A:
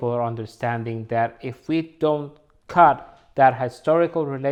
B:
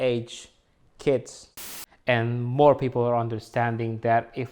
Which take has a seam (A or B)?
B